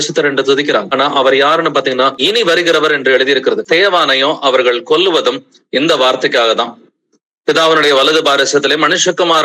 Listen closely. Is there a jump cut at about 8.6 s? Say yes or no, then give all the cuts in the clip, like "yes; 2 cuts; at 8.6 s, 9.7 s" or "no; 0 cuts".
no; 3 cuts; at 0.9 s, 2.2 s, 3.6 s